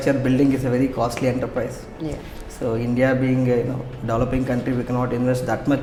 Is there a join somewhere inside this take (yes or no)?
no